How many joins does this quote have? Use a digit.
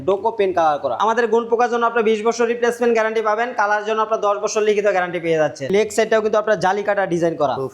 2